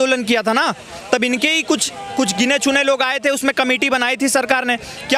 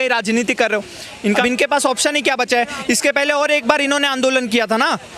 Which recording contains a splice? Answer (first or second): second